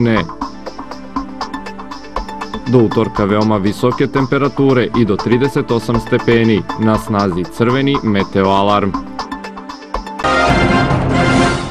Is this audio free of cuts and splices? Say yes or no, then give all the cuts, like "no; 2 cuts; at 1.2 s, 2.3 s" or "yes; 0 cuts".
no; 1 cut; at 10.2 s